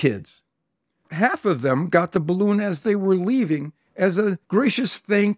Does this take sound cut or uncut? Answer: cut